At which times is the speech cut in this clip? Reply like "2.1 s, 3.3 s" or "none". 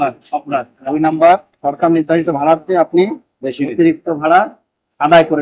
none